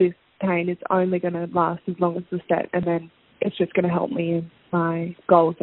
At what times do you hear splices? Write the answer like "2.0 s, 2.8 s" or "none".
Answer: none